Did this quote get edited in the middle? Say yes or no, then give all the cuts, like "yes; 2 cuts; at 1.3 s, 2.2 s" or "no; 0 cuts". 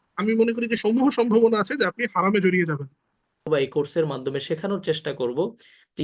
yes; 1 cut; at 3.5 s